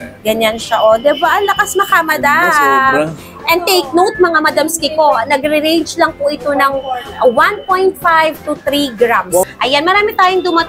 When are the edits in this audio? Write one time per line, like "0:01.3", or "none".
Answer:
0:09.5